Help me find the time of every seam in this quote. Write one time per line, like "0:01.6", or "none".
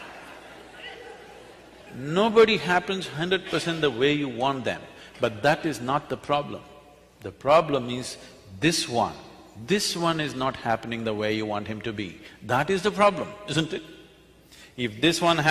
0:02.6